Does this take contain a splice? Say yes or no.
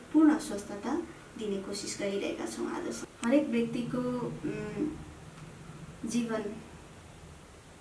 no